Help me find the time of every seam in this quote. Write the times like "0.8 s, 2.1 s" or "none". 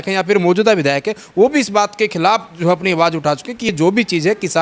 none